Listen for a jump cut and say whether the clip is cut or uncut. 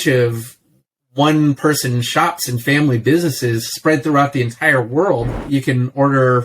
cut